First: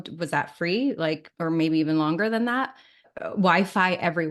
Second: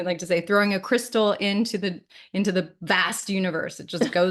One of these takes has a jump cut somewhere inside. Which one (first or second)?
first